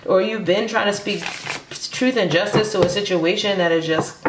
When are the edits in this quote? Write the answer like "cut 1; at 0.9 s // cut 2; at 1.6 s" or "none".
none